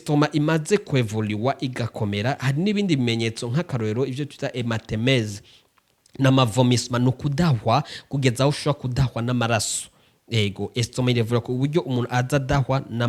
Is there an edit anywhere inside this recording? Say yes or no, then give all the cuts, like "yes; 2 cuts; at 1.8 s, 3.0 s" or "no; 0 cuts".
no; 0 cuts